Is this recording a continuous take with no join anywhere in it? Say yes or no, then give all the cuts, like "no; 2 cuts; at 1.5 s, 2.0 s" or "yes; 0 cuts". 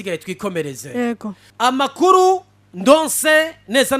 no; 1 cut; at 1.4 s